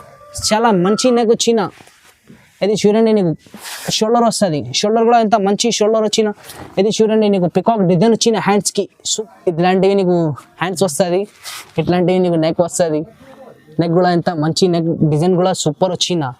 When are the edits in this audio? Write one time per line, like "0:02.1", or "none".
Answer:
0:09.0